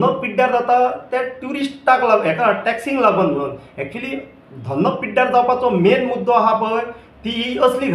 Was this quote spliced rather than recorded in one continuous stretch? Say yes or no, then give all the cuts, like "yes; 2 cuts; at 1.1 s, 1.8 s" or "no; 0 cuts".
no; 0 cuts